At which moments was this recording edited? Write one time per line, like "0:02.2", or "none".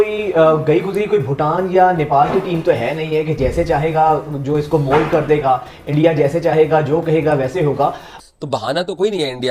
0:08.1